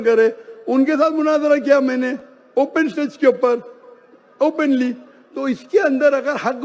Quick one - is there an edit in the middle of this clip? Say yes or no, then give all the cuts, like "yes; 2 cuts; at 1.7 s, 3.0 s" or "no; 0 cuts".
no; 0 cuts